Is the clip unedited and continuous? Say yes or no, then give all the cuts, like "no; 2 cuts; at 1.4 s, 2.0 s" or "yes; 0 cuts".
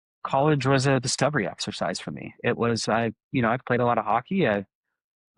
yes; 0 cuts